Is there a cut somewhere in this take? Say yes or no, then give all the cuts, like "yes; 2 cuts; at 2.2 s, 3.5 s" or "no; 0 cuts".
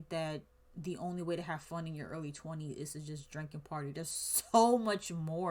no; 0 cuts